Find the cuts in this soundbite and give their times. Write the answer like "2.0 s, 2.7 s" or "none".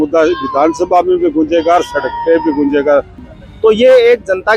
3.2 s